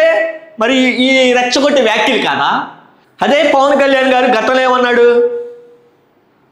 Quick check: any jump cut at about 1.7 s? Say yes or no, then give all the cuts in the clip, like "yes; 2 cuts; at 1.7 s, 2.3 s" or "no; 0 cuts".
no; 1 cut; at 3.0 s